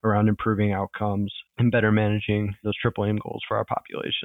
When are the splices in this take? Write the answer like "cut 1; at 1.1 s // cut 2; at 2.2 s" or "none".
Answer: none